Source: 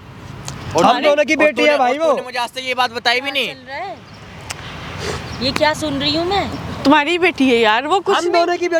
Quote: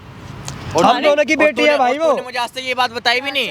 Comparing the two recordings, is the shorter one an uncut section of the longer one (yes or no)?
yes